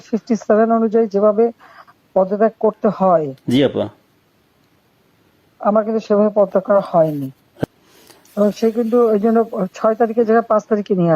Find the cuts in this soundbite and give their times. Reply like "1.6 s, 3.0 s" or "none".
7.6 s